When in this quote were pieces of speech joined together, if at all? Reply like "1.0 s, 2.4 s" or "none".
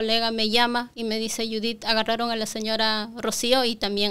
0.9 s